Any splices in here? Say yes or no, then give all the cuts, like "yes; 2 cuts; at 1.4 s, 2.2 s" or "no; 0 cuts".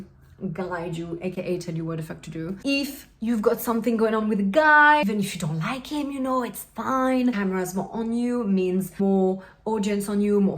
yes; 4 cuts; at 2.6 s, 5.0 s, 7.3 s, 9.0 s